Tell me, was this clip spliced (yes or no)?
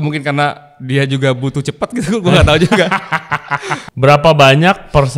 yes